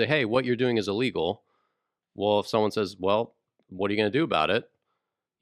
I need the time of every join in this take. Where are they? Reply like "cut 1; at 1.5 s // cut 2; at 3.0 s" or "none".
none